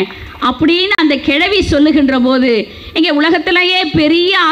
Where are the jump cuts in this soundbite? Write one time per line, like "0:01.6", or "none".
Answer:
none